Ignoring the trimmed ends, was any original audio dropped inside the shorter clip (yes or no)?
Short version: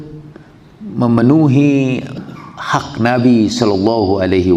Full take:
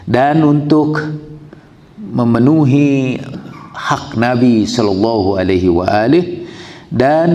no